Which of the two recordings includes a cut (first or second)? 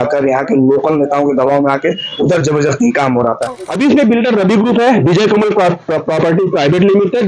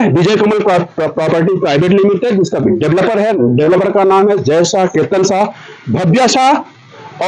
first